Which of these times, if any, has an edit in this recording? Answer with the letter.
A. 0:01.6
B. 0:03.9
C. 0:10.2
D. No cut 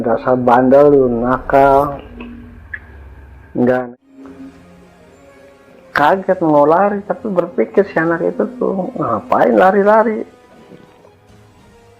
B